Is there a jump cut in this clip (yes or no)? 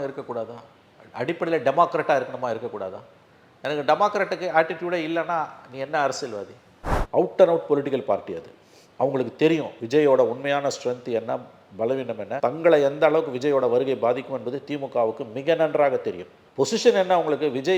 yes